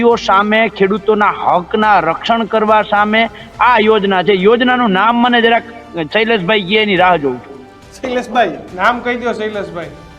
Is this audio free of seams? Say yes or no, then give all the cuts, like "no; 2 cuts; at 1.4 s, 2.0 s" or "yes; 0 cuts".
yes; 0 cuts